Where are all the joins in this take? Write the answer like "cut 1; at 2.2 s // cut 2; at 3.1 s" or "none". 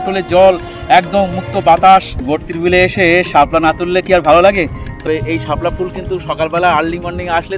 cut 1; at 2.2 s // cut 2; at 5.0 s